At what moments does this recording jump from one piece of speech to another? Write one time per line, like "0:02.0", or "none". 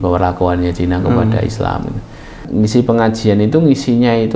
0:02.4